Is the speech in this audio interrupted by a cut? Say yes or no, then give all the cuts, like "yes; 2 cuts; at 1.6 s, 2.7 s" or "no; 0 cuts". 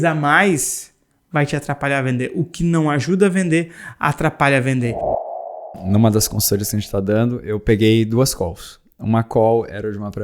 yes; 1 cut; at 5.3 s